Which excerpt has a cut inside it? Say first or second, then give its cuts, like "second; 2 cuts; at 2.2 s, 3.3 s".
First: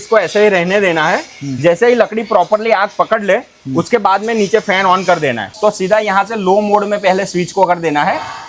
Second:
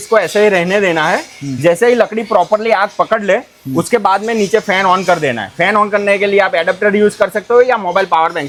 first; 1 cut; at 5.4 s